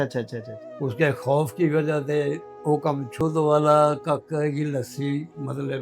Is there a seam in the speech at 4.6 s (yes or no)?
no